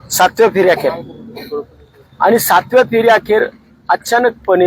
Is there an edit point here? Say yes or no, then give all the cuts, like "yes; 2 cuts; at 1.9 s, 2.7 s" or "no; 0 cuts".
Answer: no; 0 cuts